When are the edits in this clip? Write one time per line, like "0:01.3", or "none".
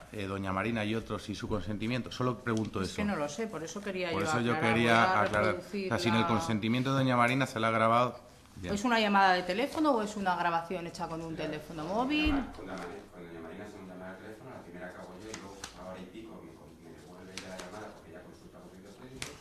0:18.0